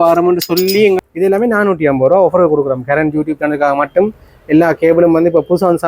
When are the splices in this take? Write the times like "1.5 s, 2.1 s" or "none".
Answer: 1.1 s